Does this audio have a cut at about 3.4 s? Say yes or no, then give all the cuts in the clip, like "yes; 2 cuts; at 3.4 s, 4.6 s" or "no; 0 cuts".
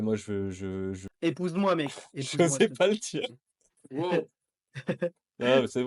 no; 1 cut; at 1.0 s